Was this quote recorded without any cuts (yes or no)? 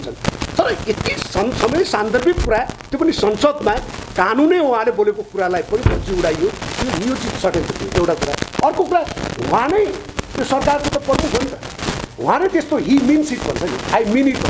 yes